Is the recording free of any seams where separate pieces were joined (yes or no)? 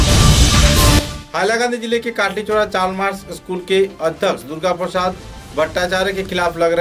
no